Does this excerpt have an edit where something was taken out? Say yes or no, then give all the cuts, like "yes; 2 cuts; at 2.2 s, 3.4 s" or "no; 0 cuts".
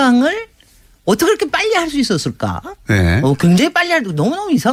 no; 0 cuts